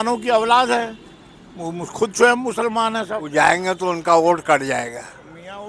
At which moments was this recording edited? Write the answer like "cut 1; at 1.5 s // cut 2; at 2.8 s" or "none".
cut 1; at 3.2 s